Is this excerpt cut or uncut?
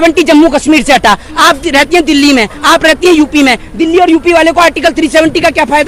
uncut